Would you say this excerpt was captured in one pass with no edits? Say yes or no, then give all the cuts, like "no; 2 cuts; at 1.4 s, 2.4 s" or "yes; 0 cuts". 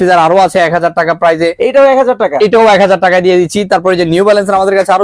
yes; 0 cuts